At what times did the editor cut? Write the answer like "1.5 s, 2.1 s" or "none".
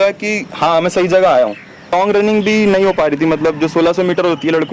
1.9 s